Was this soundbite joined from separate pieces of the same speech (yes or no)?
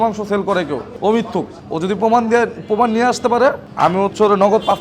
yes